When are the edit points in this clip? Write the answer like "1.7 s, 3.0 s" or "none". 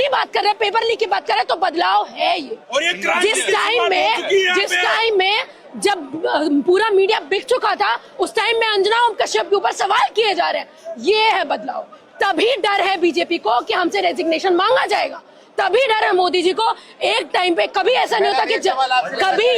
none